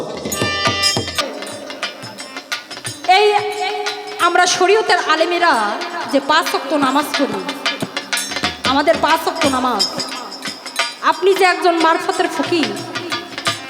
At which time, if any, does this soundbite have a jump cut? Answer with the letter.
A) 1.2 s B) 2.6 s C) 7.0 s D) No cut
A